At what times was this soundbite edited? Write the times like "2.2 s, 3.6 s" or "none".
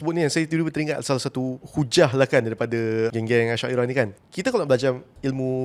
1.6 s, 3.1 s, 4.2 s